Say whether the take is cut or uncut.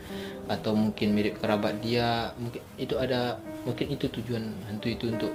uncut